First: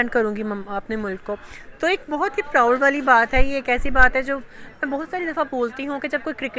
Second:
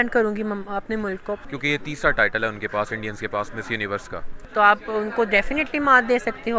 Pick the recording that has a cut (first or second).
second